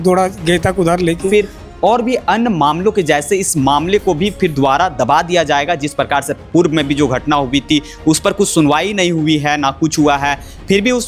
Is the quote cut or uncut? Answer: cut